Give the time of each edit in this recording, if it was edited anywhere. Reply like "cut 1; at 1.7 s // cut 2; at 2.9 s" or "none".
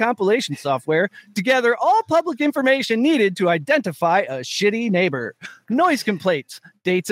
none